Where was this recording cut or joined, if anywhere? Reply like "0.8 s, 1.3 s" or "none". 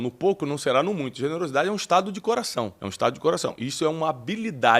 2.8 s